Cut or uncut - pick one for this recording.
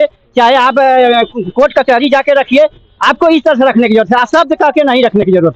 uncut